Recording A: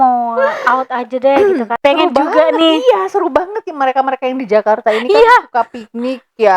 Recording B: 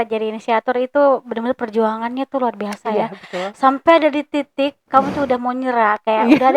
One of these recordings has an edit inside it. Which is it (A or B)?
A